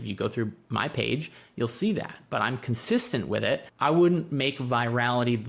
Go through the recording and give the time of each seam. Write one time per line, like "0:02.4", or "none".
0:03.7